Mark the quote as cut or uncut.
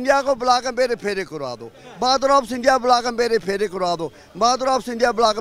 uncut